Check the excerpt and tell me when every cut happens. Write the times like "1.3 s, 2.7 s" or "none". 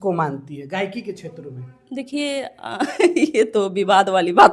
none